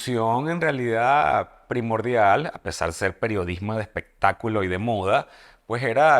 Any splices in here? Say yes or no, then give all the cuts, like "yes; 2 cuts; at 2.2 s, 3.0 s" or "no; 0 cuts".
no; 0 cuts